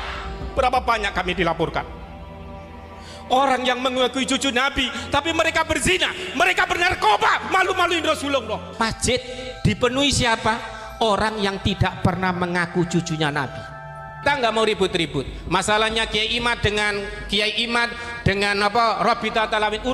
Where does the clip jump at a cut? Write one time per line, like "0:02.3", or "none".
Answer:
0:08.7
0:14.2